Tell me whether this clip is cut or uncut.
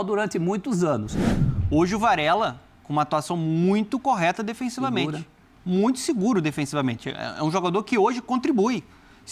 cut